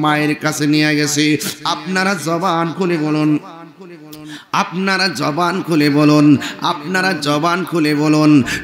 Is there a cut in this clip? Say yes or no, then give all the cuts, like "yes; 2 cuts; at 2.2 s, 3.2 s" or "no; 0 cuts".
no; 0 cuts